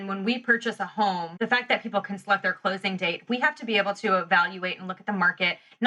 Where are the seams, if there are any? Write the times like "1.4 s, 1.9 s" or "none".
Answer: 1.3 s